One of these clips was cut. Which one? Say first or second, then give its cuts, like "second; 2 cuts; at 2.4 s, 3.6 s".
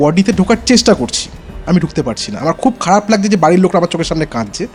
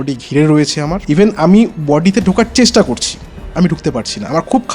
second; 1 cut; at 1.0 s